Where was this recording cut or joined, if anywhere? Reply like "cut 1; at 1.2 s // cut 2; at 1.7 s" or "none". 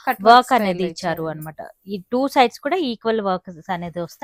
none